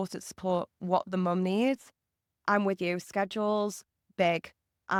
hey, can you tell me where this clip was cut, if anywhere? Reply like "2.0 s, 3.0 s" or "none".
none